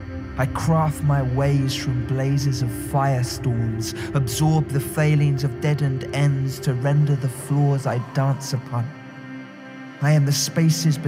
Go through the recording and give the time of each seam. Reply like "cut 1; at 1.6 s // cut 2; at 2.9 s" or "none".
none

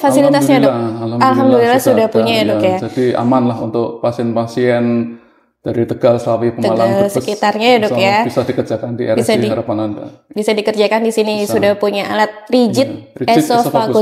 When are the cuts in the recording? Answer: none

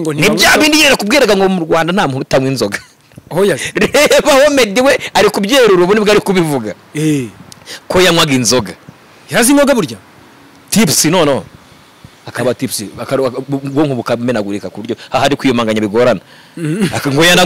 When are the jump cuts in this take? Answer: none

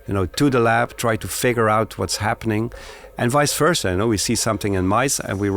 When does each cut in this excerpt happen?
none

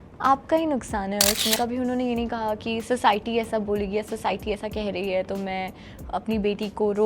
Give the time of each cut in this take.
cut 1; at 1.6 s

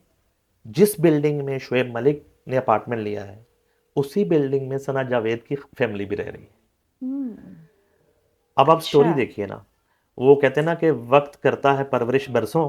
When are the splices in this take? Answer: none

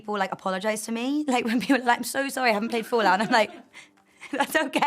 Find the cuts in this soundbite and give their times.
none

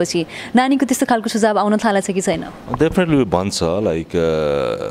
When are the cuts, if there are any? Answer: none

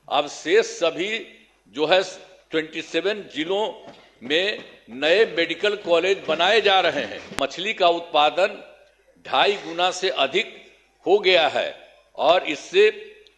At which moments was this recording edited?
cut 1; at 7.2 s

